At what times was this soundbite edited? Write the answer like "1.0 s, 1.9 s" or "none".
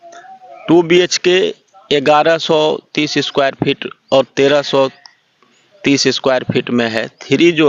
none